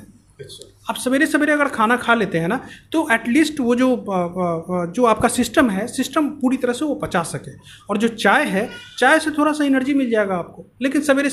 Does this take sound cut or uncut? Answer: uncut